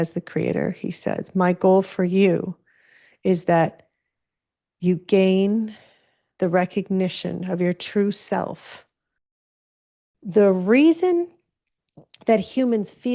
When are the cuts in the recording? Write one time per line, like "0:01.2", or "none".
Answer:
0:09.7

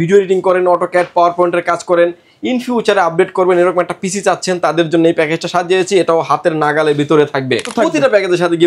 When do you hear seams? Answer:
0:07.7

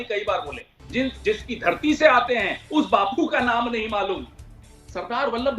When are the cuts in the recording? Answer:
0:04.5

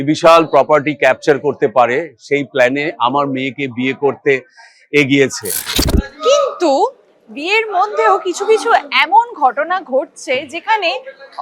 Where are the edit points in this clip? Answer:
0:05.6

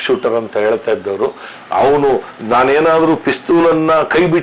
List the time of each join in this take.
0:01.5

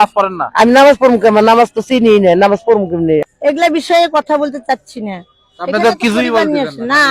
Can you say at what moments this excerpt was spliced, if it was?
0:03.2

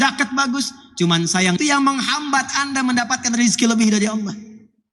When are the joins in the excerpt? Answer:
0:01.6

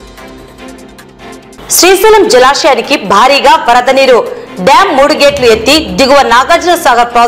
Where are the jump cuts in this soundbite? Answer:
0:01.5

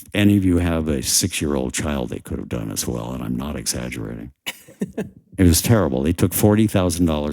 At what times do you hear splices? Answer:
none

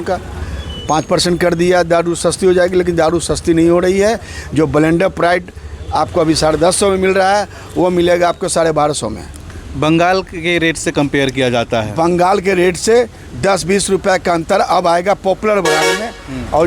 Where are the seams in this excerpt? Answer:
none

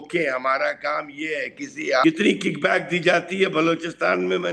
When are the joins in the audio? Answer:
0:02.0

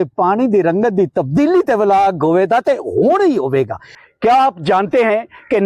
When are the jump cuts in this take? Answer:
0:03.9

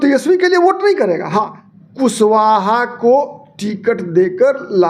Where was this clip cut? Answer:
0:01.6

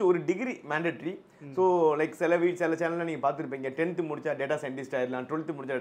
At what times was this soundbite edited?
none

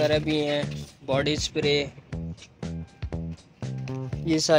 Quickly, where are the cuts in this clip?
none

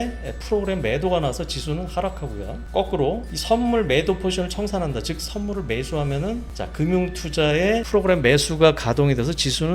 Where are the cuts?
0:02.6
0:03.3
0:06.6
0:07.9

